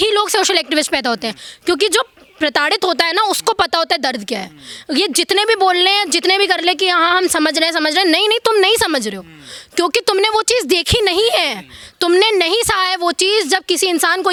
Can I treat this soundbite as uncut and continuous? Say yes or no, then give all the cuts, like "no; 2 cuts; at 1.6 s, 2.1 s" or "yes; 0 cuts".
yes; 0 cuts